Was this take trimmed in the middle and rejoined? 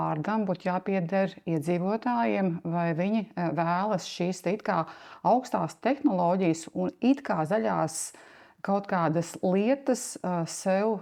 no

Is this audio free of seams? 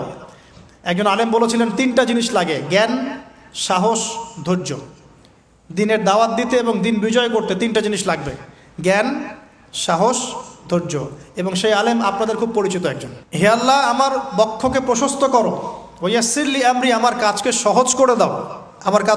yes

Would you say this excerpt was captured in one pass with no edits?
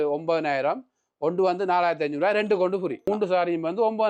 no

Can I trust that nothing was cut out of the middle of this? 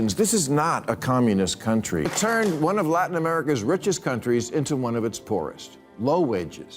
no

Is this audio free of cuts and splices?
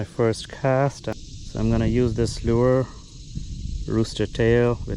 yes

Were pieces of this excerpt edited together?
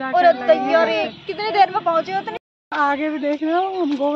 yes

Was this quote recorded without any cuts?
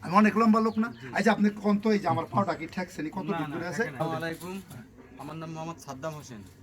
no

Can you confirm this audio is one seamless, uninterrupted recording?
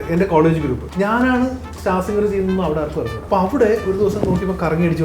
no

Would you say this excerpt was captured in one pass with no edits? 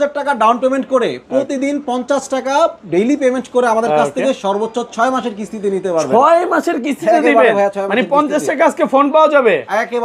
yes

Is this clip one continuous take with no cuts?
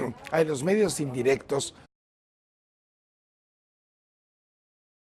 yes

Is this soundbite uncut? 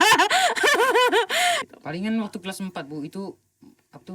no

